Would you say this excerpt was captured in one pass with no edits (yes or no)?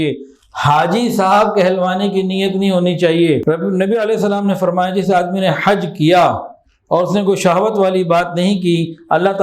no